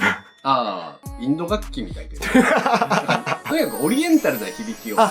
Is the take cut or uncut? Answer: cut